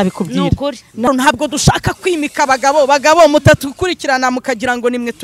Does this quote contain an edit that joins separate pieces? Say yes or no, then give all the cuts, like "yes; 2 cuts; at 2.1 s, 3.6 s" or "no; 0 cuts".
yes; 1 cut; at 1.1 s